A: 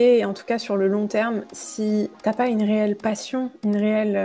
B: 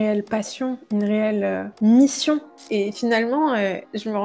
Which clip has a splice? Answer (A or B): B